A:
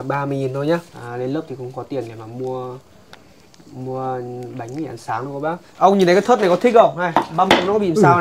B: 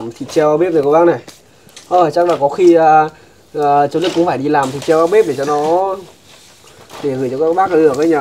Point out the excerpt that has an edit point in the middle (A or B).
A